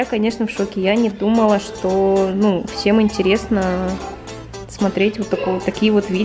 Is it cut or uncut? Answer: uncut